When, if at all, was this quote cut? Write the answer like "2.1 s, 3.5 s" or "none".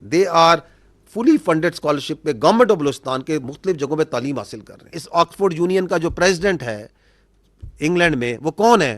5.0 s